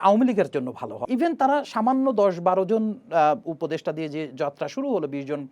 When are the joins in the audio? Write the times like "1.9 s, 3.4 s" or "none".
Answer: 1.0 s